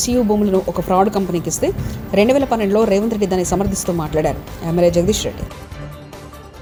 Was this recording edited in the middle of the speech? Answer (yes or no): no